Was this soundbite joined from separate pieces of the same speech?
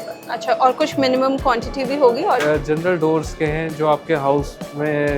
yes; 1 cut; at 2.4 s

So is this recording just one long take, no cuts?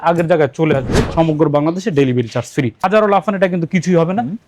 no; 2 cuts; at 1.0 s, 2.8 s

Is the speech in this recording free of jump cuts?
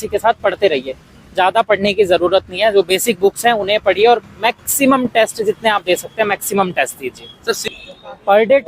no; 1 cut; at 7.6 s

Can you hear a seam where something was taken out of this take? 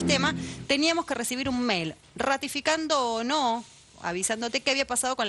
no; 0 cuts

